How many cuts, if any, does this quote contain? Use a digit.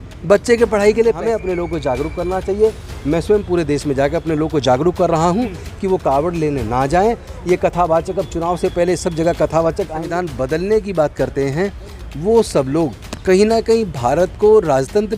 2